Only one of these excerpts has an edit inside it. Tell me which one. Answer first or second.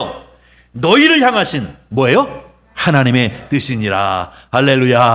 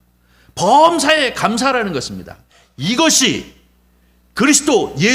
second